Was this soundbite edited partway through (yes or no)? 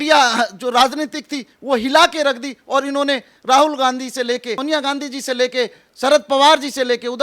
yes